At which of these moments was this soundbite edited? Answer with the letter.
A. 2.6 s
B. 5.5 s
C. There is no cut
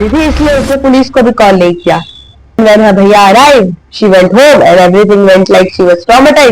A